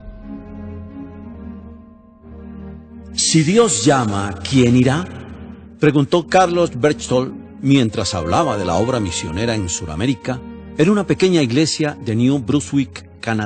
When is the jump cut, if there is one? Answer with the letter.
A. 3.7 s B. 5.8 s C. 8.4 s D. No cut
D